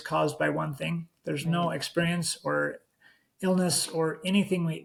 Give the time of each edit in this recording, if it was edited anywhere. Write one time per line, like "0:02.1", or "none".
none